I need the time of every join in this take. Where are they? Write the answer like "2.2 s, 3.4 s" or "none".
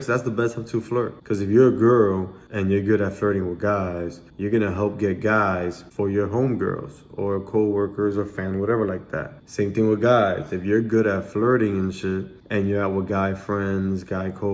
1.2 s